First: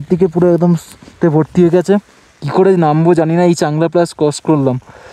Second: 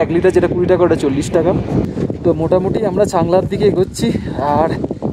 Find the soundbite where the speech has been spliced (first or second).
second